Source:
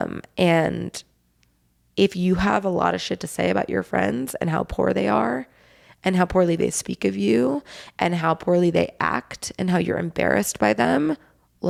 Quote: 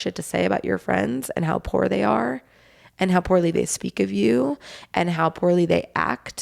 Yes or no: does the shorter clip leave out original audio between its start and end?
no